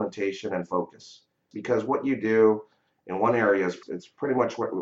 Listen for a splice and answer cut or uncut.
cut